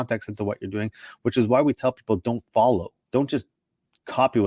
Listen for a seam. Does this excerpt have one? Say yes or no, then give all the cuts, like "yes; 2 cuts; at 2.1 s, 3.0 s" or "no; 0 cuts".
yes; 1 cut; at 3.0 s